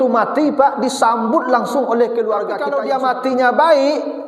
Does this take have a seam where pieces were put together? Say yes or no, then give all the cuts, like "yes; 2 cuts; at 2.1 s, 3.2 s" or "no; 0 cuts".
yes; 1 cut; at 2.7 s